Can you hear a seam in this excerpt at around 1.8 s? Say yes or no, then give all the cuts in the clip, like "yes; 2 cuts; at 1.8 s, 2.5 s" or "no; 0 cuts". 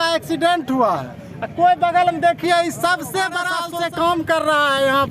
no; 1 cut; at 3.6 s